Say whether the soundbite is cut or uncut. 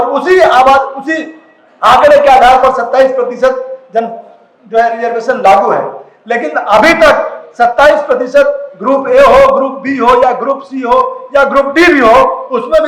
uncut